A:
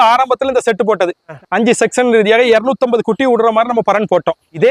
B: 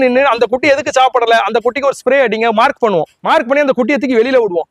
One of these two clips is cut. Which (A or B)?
B